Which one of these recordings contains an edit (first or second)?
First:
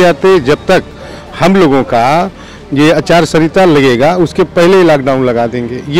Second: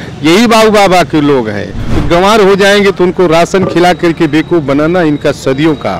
second